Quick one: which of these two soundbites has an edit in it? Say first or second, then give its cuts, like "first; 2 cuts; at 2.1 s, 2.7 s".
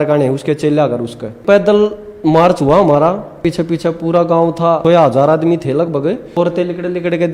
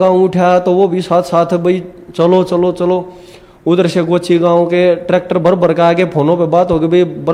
first; 4 cuts; at 1.4 s, 3.4 s, 4.8 s, 6.4 s